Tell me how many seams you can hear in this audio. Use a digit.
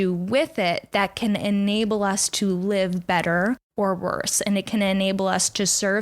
1